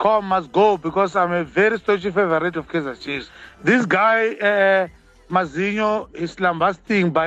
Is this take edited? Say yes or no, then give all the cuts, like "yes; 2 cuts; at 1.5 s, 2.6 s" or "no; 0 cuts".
no; 0 cuts